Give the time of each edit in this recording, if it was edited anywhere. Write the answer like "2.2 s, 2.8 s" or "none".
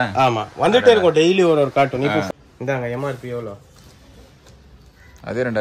2.3 s